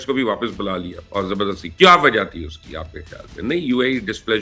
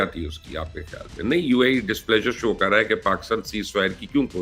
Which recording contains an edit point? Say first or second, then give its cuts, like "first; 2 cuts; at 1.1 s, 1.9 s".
first; 1 cut; at 1.0 s